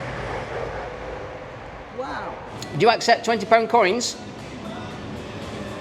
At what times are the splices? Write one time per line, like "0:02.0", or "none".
0:02.5